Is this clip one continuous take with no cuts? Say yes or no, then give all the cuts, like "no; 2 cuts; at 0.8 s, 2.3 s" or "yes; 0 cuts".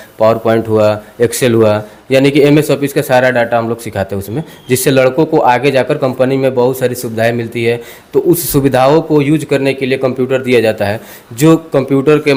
yes; 0 cuts